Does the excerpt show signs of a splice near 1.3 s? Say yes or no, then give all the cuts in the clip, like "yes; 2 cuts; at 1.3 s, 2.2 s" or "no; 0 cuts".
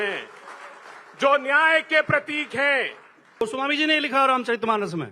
no; 1 cut; at 3.4 s